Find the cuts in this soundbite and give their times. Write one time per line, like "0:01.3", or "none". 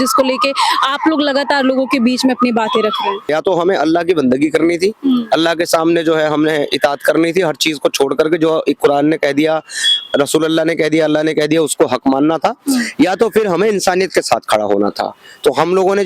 0:03.3

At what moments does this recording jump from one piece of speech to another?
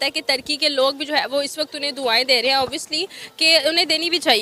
none

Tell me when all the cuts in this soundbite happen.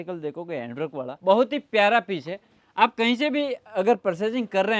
0:01.1

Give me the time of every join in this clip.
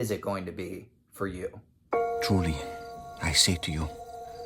0:01.7

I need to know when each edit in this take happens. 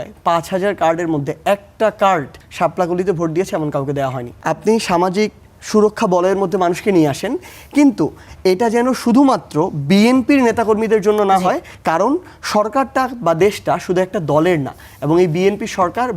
0:02.4
0:04.3
0:11.7

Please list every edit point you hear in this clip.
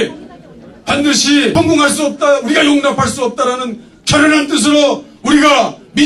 0:01.5

